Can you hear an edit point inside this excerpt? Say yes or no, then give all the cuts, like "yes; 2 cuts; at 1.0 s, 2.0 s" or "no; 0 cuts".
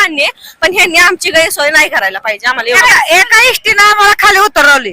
yes; 1 cut; at 2.8 s